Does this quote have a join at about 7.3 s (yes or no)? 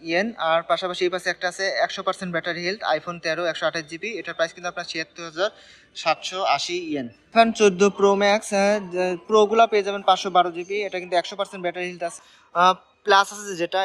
yes